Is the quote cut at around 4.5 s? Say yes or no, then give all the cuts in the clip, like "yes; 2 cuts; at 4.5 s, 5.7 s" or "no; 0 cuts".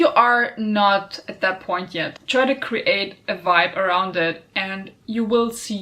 no; 1 cut; at 2.2 s